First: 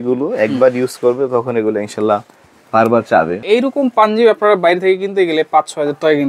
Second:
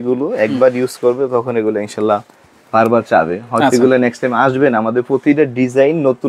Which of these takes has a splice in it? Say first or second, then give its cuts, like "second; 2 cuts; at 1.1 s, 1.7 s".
first; 1 cut; at 3.4 s